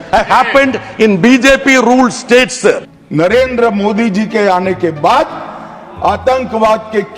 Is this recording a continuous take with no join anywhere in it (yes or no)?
no